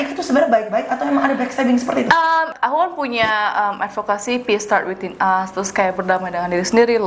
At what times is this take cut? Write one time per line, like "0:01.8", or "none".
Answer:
0:02.5

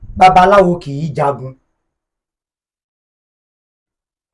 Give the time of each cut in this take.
none

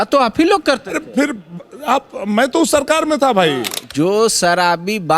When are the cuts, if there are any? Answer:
0:03.8

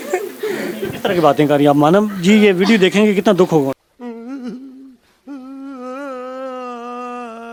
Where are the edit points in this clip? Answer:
none

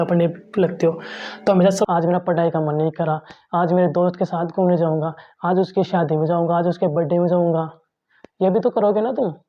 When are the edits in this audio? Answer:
0:01.9

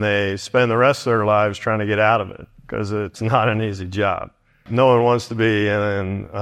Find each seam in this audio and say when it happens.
0:03.2
0:04.7

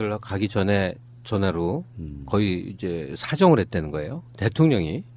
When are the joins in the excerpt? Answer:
0:03.6

